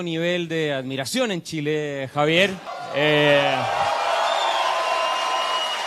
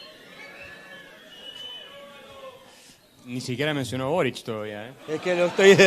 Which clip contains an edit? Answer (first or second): first